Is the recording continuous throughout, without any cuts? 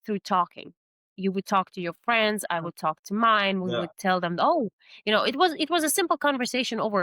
yes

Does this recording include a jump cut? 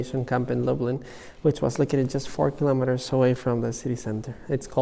no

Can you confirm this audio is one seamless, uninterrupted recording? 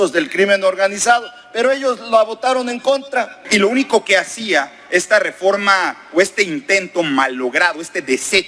no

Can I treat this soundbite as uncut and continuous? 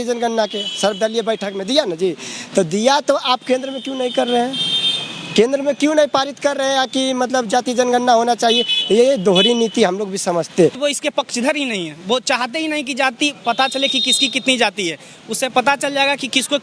no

